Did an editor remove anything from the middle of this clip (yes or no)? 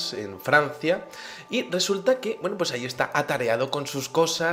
no